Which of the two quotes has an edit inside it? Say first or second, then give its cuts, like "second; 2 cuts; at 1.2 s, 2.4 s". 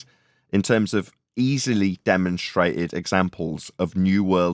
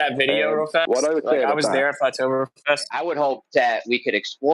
second; 1 cut; at 2.9 s